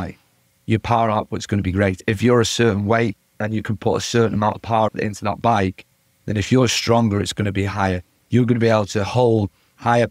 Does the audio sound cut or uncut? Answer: cut